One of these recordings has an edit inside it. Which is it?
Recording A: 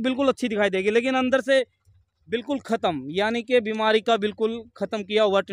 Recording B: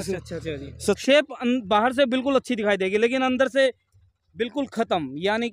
B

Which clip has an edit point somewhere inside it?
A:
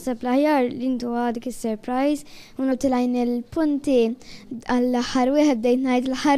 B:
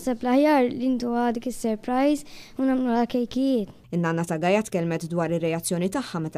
B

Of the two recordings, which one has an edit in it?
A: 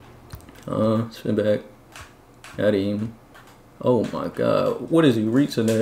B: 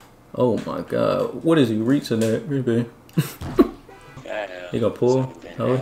B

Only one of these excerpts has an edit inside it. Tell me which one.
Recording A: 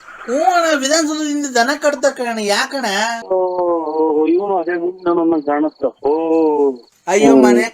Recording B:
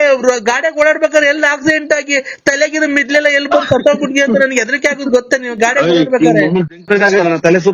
A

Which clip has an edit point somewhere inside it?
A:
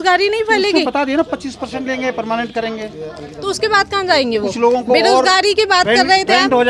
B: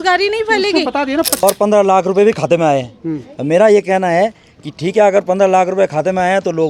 B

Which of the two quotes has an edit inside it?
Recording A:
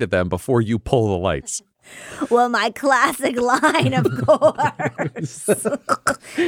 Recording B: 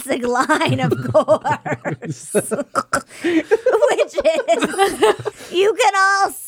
B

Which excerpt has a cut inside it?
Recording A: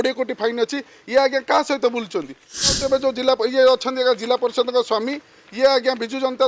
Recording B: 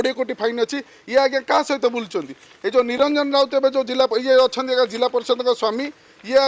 A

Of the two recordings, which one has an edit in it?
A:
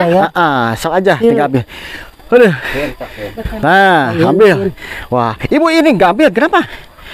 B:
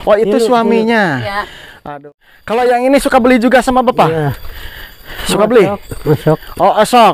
B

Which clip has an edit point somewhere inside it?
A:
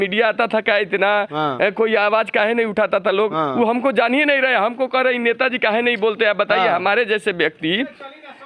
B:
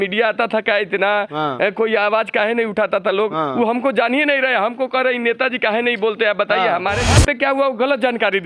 B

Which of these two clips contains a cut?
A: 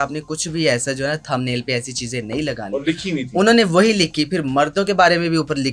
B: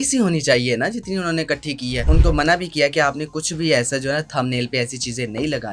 B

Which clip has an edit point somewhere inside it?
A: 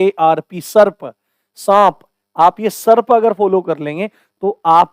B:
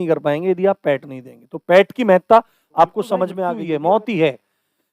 B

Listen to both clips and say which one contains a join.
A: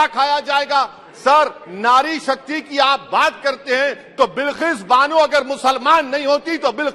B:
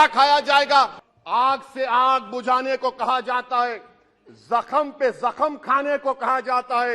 B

